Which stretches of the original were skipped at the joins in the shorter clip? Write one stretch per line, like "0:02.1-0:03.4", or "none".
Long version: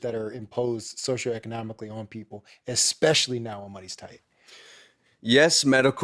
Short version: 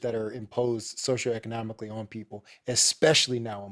none